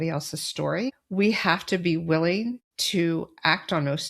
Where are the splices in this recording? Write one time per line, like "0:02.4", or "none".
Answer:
0:01.0
0:02.7